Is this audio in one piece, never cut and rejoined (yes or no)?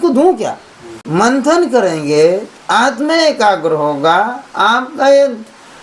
no